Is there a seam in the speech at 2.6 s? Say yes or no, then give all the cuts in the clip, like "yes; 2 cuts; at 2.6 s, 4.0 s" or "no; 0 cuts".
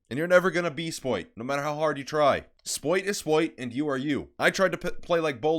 no; 1 cut; at 1.3 s